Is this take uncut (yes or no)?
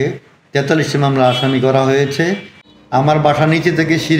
no